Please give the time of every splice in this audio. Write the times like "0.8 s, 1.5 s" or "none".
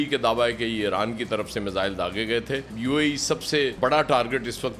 2.7 s